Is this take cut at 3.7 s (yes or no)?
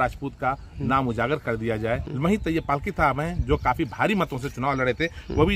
no